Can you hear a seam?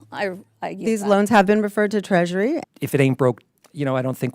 yes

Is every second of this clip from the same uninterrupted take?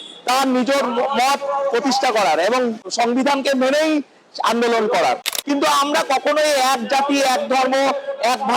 no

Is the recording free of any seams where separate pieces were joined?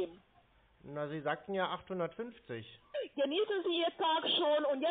no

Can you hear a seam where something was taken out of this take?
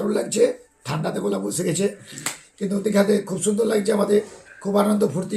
no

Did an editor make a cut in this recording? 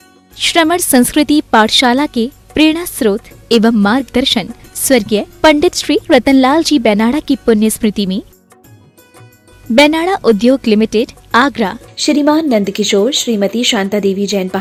no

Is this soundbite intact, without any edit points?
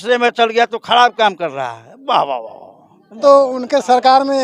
no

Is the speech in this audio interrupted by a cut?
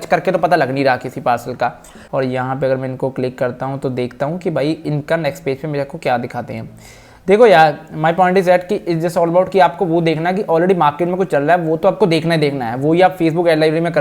yes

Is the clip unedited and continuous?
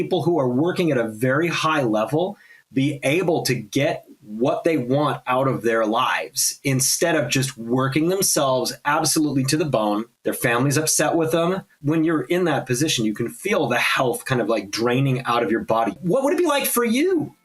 no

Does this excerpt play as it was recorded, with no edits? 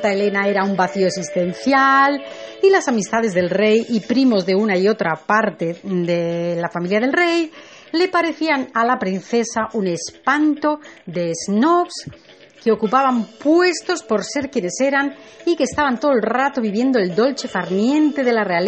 no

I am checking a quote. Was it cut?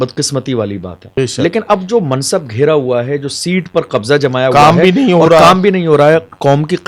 yes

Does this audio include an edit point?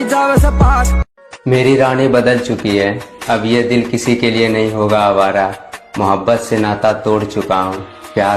yes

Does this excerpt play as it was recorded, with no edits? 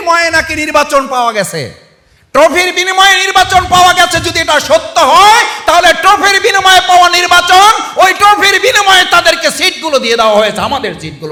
yes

